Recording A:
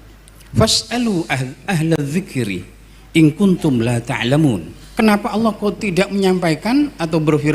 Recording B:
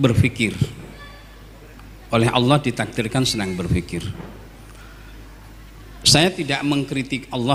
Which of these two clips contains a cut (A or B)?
A